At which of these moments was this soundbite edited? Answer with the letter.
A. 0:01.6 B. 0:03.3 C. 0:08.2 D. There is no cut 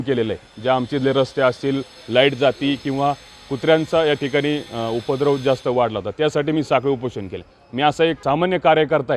C